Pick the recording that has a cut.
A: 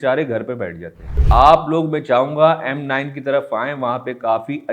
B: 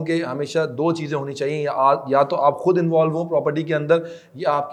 A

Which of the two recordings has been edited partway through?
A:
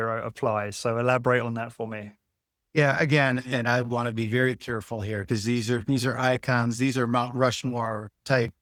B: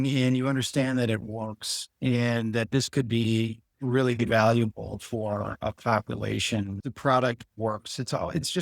B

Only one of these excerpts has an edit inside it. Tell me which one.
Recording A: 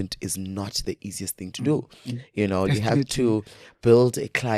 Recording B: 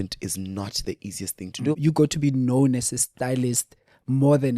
B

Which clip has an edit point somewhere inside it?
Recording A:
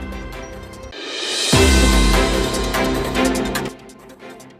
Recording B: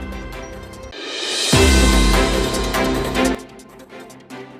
A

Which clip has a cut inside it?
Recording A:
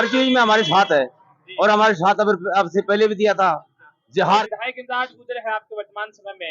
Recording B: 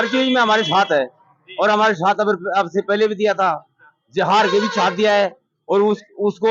A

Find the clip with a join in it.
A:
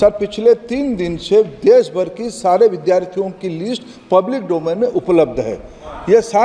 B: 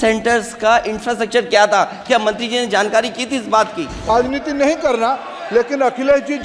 B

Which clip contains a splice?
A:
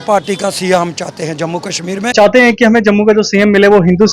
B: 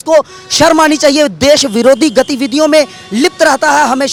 A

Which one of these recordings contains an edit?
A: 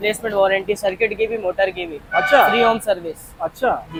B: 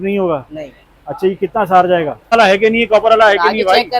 B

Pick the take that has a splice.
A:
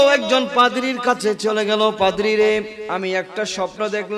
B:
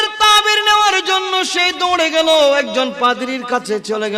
A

